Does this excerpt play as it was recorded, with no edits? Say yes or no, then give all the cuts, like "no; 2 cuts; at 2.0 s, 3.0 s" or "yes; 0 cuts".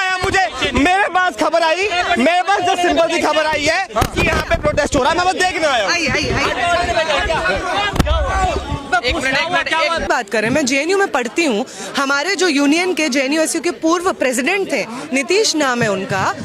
no; 1 cut; at 10.1 s